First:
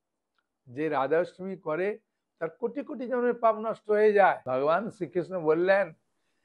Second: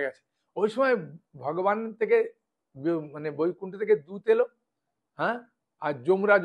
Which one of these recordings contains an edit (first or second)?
first